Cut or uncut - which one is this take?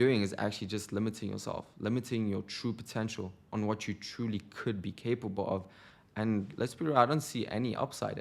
uncut